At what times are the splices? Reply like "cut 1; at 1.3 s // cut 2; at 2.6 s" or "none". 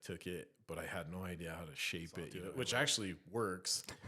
cut 1; at 2.3 s